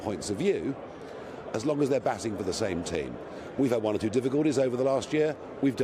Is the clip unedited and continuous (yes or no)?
yes